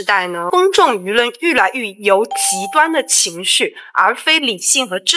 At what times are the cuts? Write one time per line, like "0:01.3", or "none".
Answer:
none